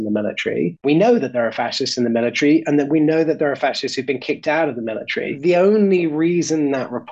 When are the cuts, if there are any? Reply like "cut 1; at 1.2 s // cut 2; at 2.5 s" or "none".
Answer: cut 1; at 0.8 s // cut 2; at 5.3 s